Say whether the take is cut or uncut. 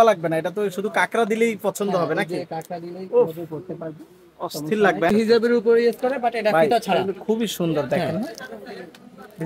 cut